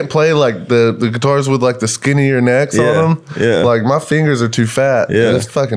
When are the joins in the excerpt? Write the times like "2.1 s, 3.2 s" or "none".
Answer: none